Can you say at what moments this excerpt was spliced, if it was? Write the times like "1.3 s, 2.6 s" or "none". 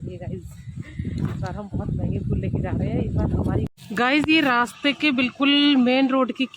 3.8 s